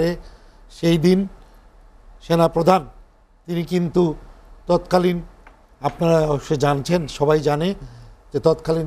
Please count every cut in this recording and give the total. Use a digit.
0